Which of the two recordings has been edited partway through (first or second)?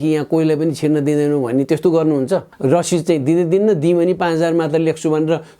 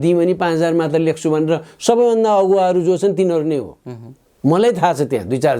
first